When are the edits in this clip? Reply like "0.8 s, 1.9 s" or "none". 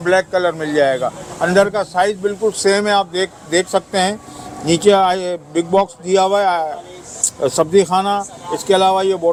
none